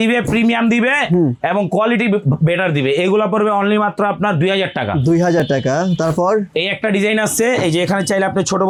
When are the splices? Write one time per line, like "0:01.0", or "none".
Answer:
none